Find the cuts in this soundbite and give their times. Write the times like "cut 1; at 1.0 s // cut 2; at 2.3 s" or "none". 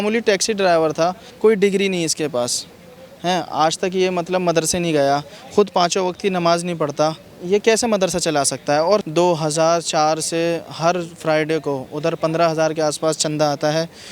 cut 1; at 1.2 s // cut 2; at 7.3 s // cut 3; at 9.0 s